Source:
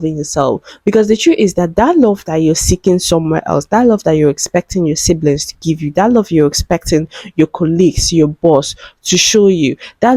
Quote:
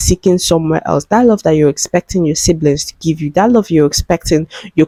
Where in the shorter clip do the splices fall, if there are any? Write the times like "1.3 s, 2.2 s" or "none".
none